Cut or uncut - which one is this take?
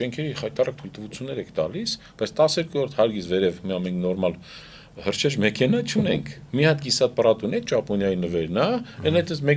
uncut